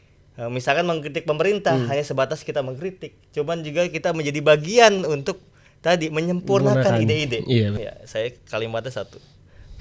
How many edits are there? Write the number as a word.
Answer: one